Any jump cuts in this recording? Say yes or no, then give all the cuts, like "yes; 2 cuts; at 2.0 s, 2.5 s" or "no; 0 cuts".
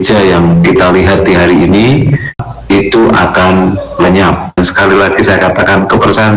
yes; 2 cuts; at 2.5 s, 4.5 s